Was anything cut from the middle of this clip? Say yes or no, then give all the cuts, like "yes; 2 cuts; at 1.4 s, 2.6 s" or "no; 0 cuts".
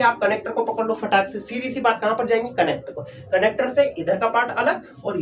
no; 0 cuts